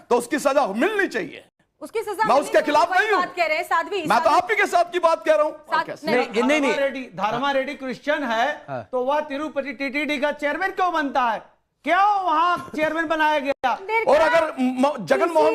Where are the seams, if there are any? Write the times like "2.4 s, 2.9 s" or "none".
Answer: 5.9 s, 13.8 s